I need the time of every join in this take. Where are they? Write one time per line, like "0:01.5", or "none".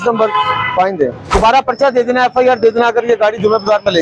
0:01.3